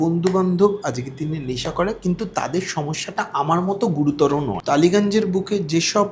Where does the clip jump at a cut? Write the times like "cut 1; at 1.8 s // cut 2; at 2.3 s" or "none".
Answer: cut 1; at 4.6 s

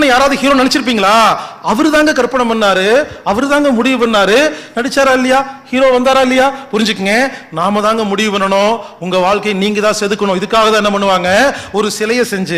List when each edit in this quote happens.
none

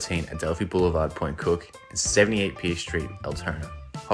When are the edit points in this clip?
none

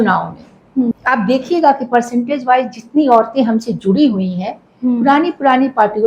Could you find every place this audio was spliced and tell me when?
cut 1; at 1.0 s

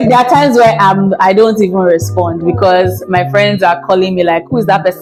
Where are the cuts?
none

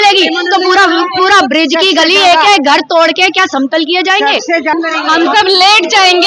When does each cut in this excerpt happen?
cut 1; at 4.7 s

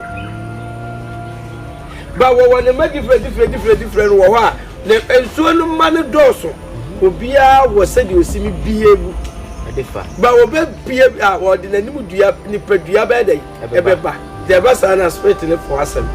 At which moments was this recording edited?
cut 1; at 14.5 s

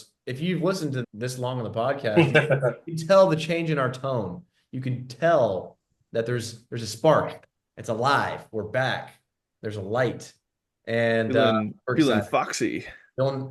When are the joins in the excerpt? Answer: cut 1; at 1.0 s

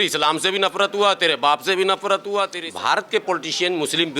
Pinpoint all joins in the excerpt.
cut 1; at 2.6 s

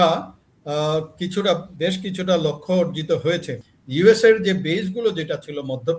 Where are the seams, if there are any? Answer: cut 1; at 3.5 s

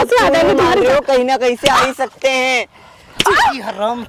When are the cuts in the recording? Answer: none

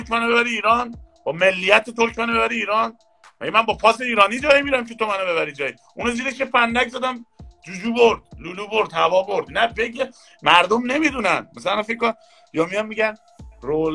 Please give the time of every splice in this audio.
none

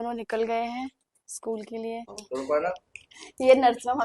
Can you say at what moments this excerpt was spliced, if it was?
cut 1; at 2.2 s

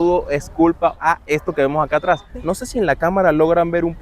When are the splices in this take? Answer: cut 1; at 1.0 s // cut 2; at 2.3 s

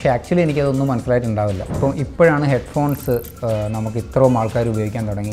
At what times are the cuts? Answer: cut 1; at 1.7 s

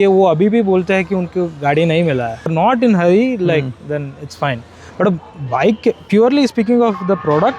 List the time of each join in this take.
none

